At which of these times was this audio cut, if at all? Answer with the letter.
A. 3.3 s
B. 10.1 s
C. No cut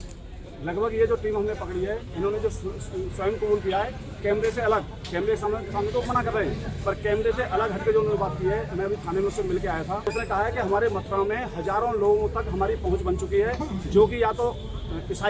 B